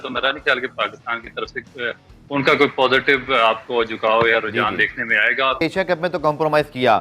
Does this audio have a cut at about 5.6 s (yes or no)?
yes